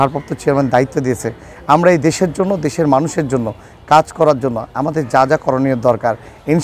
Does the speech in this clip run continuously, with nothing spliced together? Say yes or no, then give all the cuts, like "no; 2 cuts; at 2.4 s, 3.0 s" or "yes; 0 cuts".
yes; 0 cuts